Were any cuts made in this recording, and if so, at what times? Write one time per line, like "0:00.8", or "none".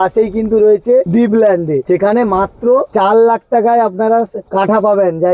0:01.4
0:02.9
0:04.4